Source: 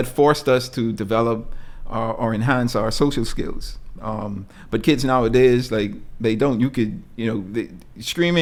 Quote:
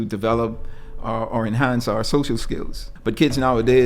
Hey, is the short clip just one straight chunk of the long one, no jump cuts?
no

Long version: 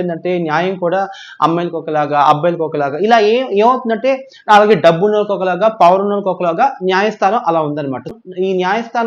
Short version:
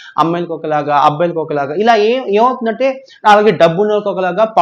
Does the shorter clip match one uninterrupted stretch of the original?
yes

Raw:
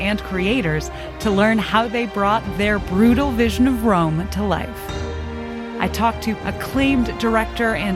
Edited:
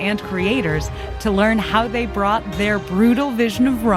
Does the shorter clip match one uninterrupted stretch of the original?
yes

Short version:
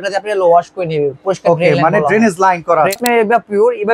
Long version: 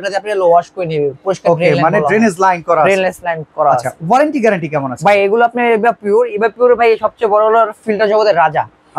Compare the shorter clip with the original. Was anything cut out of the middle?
yes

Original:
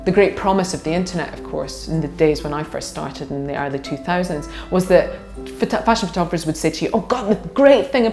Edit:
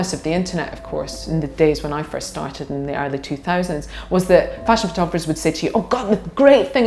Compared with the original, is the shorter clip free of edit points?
no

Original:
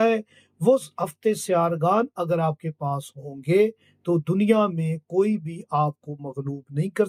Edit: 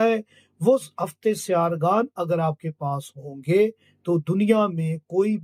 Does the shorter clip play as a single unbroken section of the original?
yes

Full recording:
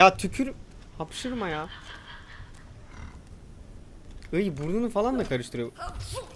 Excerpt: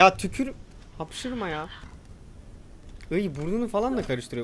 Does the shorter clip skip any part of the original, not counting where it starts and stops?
yes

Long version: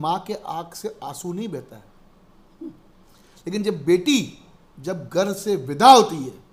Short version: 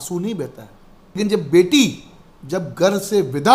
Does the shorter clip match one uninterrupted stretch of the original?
no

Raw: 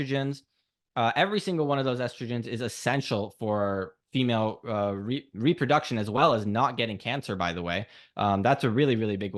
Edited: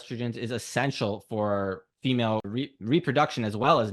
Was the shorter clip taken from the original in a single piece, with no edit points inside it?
no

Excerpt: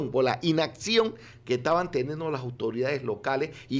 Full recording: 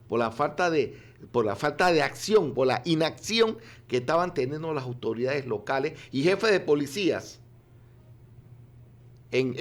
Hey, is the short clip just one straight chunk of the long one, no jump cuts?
yes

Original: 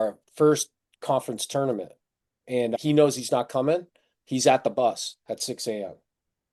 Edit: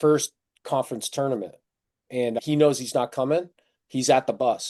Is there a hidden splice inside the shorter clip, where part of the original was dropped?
no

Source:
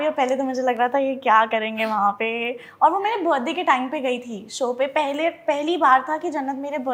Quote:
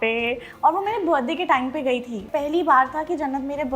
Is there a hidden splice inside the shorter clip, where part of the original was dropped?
yes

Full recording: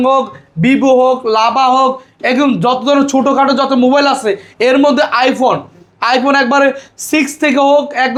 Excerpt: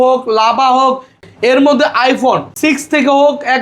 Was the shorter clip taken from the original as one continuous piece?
no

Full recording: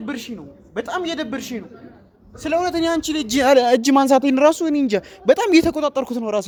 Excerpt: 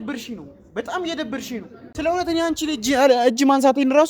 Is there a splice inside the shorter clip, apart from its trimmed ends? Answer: yes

